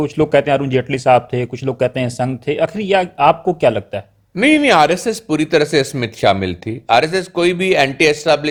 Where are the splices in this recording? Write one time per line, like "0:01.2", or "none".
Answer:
none